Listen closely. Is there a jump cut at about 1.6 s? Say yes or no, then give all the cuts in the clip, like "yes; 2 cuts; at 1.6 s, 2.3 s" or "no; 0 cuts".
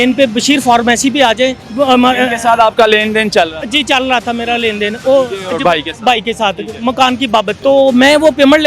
yes; 2 cuts; at 1.6 s, 7.5 s